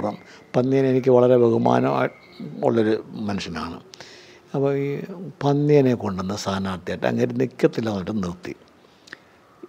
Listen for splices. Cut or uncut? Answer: uncut